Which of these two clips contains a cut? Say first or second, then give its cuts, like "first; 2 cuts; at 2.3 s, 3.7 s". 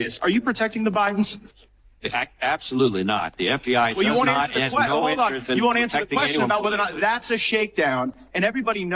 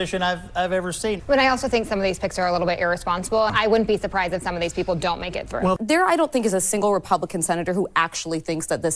second; 3 cuts; at 1.2 s, 3.5 s, 5.8 s